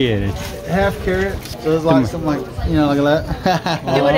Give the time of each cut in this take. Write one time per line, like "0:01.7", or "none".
0:01.4